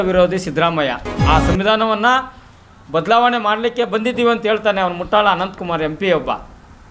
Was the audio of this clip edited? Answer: yes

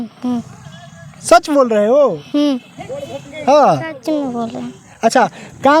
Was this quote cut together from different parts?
no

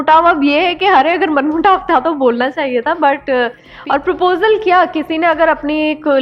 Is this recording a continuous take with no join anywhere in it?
no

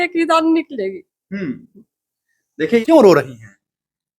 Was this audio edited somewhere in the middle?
yes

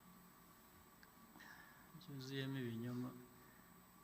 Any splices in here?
no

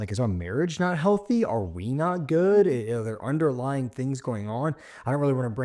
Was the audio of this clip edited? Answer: no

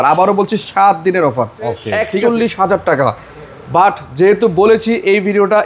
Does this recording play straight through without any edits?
no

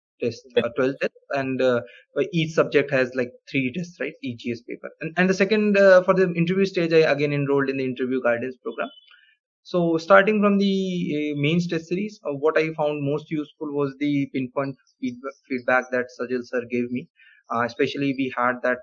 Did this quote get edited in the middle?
no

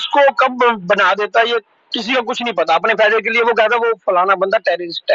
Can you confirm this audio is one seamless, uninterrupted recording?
yes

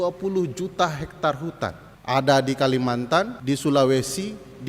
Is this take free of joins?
no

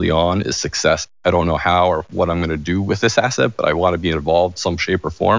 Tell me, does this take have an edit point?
yes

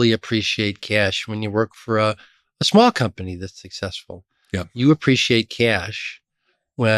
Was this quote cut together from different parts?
no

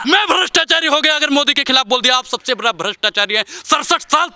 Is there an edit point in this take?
no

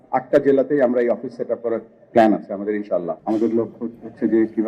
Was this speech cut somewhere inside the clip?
yes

